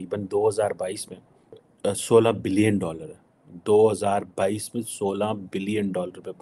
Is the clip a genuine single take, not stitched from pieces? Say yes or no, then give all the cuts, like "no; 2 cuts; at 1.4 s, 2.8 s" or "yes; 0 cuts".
no; 1 cut; at 1.7 s